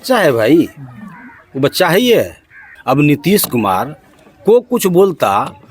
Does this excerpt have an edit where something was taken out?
yes; 1 cut; at 2.7 s

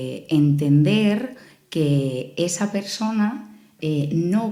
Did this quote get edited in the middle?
no; 0 cuts

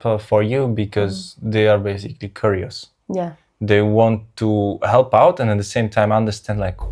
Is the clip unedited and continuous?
yes; 0 cuts

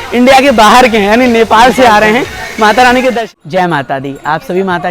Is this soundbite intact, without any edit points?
no; 1 cut; at 3.3 s

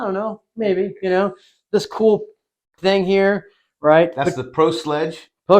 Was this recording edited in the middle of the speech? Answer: no; 0 cuts

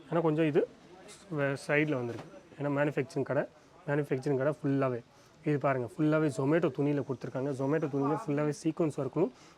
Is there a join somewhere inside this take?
no; 0 cuts

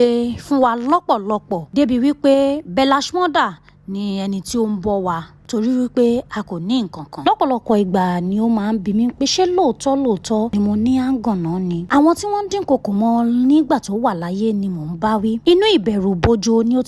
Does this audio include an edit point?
yes; 3 cuts; at 7.2 s, 11.8 s, 15.4 s

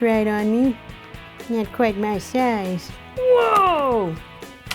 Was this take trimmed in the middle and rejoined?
yes; 1 cut; at 2.9 s

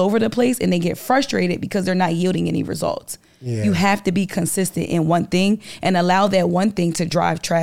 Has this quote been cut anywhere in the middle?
no; 0 cuts

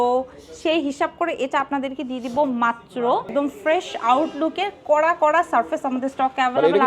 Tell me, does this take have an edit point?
yes; 1 cut; at 3.3 s

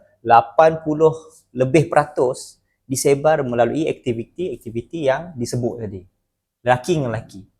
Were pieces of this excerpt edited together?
no; 0 cuts

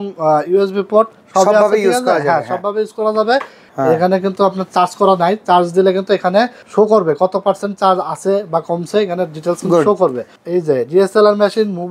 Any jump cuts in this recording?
yes; 3 cuts; at 3.6 s, 6.6 s, 10.3 s

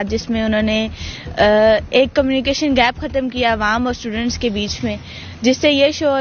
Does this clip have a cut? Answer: no; 0 cuts

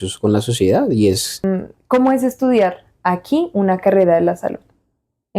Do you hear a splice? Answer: yes; 1 cut; at 1.4 s

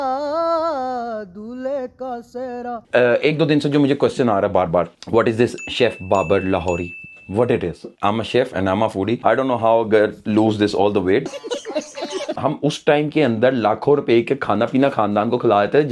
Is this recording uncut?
no; 3 cuts; at 2.8 s, 7.9 s, 12.3 s

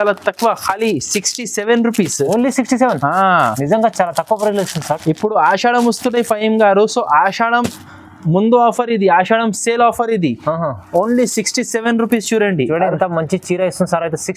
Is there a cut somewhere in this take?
no; 0 cuts

